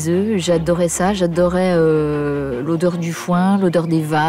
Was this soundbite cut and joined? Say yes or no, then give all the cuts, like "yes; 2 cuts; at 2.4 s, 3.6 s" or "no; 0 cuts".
no; 0 cuts